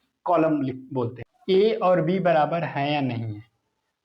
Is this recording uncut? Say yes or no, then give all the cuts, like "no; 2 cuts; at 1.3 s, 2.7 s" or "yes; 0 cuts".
no; 1 cut; at 1.2 s